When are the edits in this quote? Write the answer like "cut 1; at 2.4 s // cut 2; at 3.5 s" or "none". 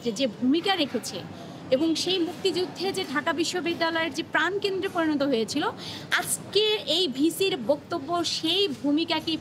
none